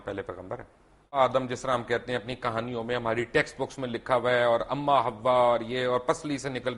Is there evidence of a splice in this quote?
yes; 1 cut; at 1.2 s

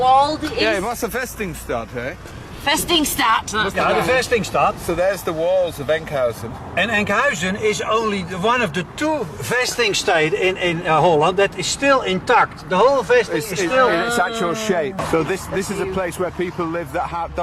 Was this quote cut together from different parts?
yes; 1 cut; at 15.0 s

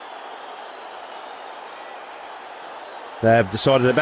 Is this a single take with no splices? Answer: yes; 0 cuts

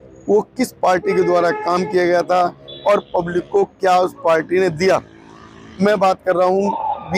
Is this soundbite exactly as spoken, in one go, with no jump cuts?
yes; 0 cuts

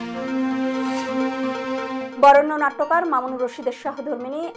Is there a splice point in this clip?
yes; 1 cut; at 2.1 s

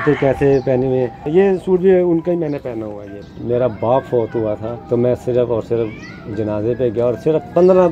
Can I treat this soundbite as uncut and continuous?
no; 3 cuts; at 1.2 s, 3.3 s, 4.7 s

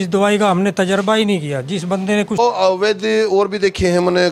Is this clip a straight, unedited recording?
no; 1 cut; at 2.4 s

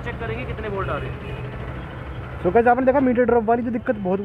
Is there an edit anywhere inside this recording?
no; 0 cuts

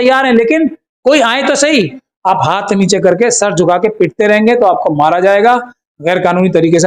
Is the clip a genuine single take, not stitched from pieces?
no; 1 cut; at 2.1 s

